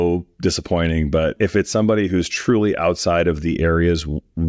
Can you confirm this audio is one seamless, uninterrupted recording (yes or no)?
yes